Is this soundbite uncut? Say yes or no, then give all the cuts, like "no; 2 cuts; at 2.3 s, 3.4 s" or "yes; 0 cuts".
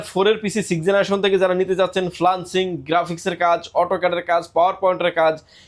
yes; 0 cuts